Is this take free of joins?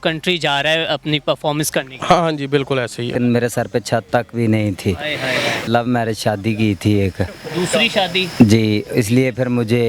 no; 2 cuts; at 3.1 s, 5.6 s

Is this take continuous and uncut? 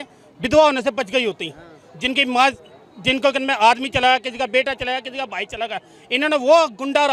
yes; 0 cuts

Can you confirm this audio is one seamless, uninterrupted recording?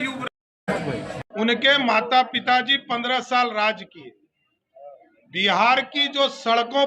no; 1 cut; at 1.3 s

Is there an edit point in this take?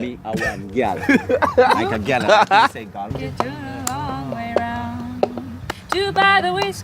yes; 1 cut; at 3.1 s

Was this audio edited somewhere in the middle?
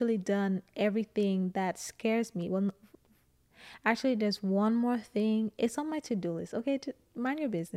no; 0 cuts

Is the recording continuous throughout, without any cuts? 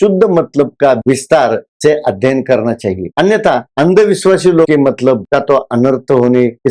no; 1 cut; at 1.0 s

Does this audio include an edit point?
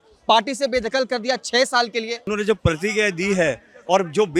yes; 1 cut; at 2.3 s

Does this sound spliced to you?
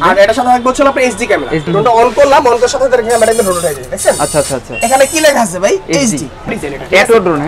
yes; 2 cuts; at 1.6 s, 6.5 s

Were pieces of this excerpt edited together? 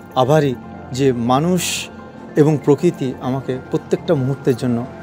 no; 0 cuts

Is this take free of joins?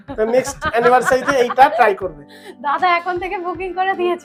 yes; 0 cuts

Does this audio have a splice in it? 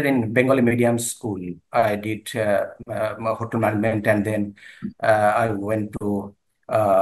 yes; 1 cut; at 1.6 s

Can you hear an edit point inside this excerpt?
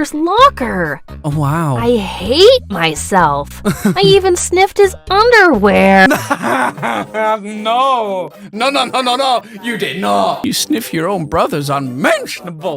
yes; 1 cut; at 10.4 s

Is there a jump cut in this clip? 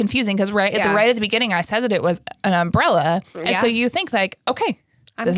no; 0 cuts

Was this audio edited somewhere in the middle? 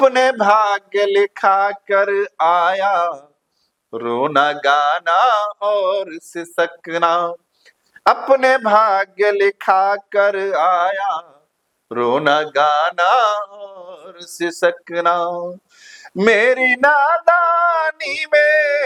no; 0 cuts

